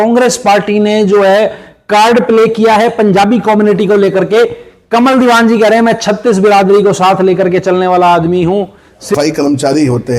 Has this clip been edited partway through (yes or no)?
yes